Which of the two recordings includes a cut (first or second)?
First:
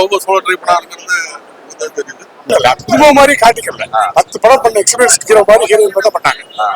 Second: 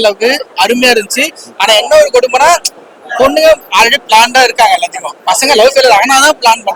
first